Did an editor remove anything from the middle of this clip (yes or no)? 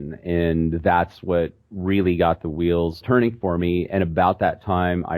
yes